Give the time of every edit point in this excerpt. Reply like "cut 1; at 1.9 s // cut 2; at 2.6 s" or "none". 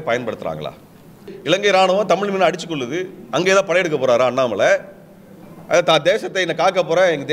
cut 1; at 1.3 s